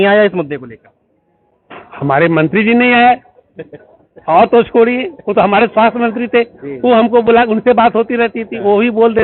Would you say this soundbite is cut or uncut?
uncut